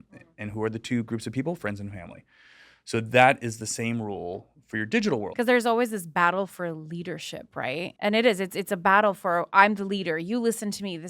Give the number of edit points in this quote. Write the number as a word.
two